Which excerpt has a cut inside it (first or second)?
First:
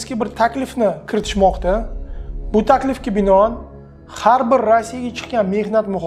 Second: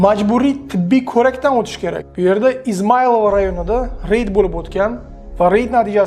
second